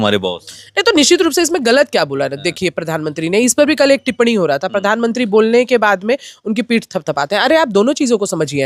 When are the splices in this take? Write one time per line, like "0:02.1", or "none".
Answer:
none